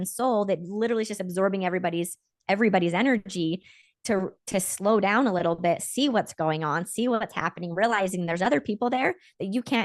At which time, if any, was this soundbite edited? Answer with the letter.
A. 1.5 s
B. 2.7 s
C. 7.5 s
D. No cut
D